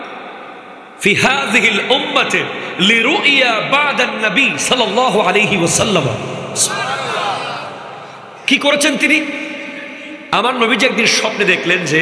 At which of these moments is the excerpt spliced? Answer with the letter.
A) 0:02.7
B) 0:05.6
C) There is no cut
C